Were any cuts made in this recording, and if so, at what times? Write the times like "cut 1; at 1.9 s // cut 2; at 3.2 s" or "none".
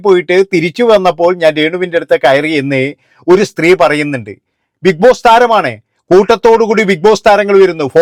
none